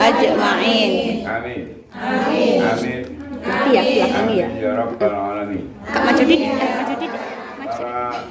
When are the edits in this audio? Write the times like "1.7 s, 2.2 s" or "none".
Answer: 7.3 s